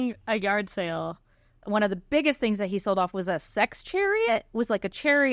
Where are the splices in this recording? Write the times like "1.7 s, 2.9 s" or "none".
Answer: 1.6 s